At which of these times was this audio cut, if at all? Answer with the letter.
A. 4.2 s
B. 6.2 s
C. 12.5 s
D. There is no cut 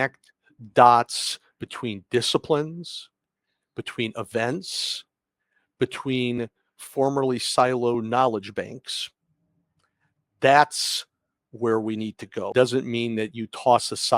C